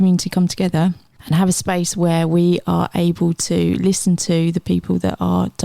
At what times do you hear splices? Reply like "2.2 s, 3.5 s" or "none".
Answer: 1.1 s